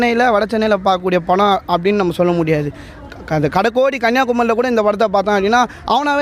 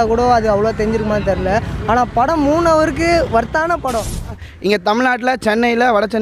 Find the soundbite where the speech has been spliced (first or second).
second